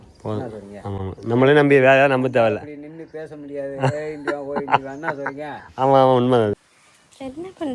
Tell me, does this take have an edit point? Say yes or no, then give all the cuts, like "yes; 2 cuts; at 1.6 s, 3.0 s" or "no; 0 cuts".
yes; 1 cut; at 6.5 s